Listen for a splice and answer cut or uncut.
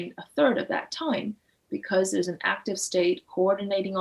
uncut